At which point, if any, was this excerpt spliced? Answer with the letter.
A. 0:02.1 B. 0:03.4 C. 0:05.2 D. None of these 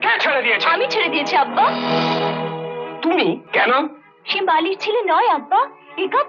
B